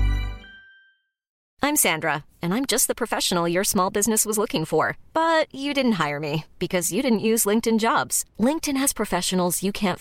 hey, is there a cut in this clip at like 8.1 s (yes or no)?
no